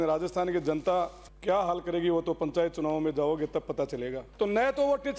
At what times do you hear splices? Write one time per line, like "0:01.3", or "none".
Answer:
0:01.3
0:04.2